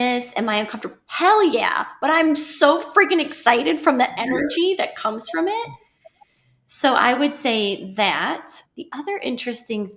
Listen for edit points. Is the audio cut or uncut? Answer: uncut